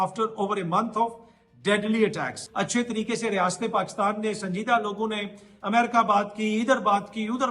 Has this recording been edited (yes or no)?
yes